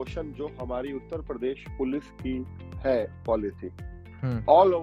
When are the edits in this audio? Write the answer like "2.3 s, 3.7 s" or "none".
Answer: none